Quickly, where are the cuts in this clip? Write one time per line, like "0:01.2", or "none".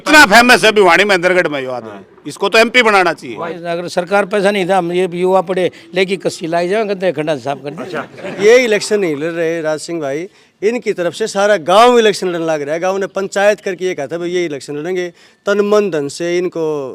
0:03.5
0:08.3